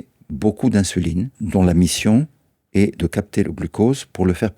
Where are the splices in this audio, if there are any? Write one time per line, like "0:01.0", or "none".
0:01.4
0:03.4